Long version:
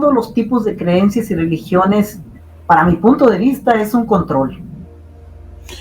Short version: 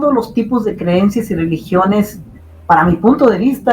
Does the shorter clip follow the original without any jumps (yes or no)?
yes